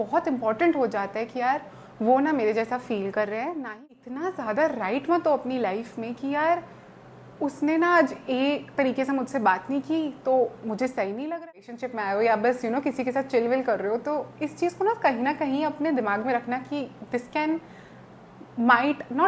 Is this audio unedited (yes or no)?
no